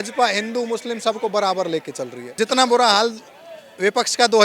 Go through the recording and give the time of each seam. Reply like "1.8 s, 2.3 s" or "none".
2.2 s